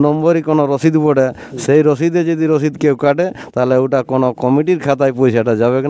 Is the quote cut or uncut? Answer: uncut